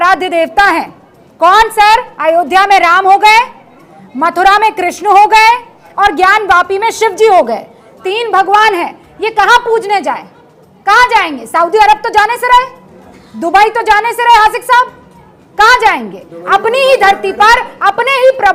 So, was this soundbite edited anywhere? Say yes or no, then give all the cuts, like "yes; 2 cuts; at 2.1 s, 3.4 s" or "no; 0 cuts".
no; 0 cuts